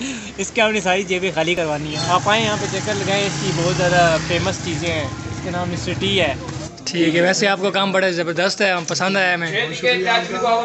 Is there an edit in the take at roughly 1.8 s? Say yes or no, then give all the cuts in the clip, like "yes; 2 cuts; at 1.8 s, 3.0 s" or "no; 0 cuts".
yes; 2 cuts; at 1.8 s, 6.6 s